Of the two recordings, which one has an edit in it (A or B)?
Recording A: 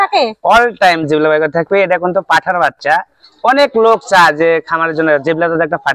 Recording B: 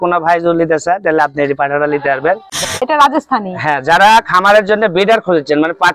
B